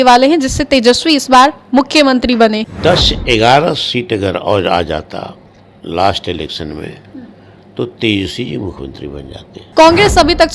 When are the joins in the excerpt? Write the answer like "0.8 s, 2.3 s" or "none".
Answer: 2.7 s, 9.6 s